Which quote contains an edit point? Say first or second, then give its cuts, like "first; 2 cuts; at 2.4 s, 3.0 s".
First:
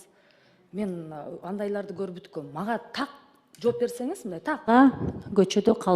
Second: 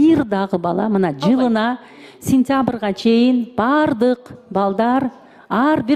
first; 1 cut; at 4.7 s